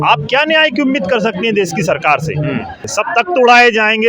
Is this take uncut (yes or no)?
no